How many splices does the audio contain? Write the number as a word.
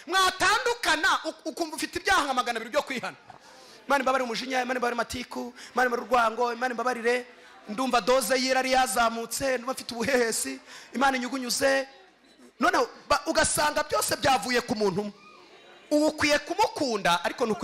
zero